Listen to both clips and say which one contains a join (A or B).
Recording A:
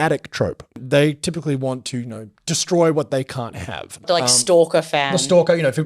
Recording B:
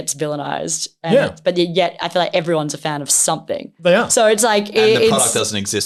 A